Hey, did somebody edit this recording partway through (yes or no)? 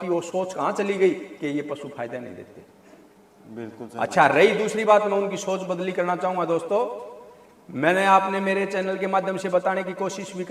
no